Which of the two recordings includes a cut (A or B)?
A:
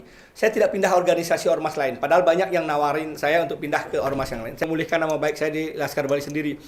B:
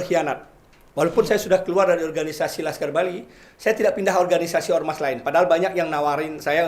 A